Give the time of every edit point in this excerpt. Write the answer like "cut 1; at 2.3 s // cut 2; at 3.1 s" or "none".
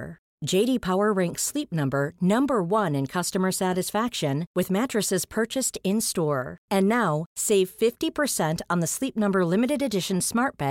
none